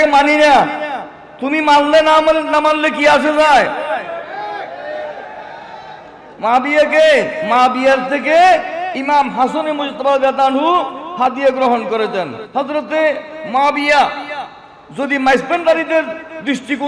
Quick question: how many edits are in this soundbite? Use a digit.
2